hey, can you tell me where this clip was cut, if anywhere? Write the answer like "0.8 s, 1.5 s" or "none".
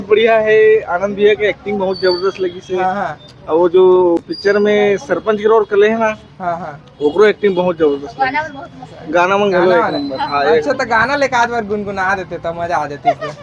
none